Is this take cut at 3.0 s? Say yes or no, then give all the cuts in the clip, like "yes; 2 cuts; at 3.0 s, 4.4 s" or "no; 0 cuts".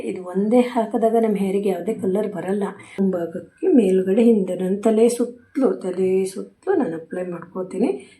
yes; 1 cut; at 3.0 s